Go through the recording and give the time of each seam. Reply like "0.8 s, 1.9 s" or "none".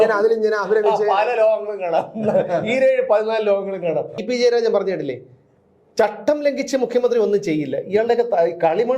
4.2 s